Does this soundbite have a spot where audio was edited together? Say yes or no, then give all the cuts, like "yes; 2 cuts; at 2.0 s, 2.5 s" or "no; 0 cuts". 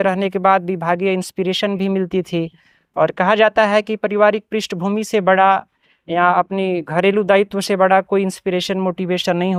no; 0 cuts